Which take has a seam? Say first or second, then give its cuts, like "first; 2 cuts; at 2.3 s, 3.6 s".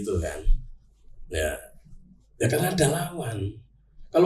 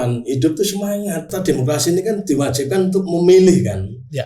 second; 1 cut; at 1.3 s